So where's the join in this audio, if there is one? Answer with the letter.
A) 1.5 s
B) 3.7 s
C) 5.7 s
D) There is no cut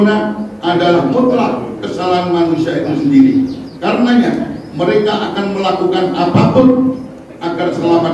B